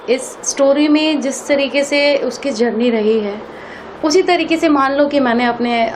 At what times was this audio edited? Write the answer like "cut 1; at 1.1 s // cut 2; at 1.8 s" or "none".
none